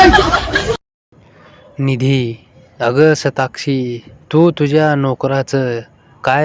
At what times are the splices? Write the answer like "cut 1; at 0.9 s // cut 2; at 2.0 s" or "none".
cut 1; at 0.9 s